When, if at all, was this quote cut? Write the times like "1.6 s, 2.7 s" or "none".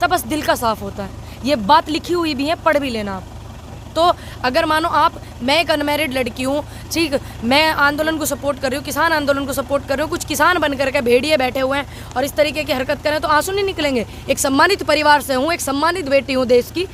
none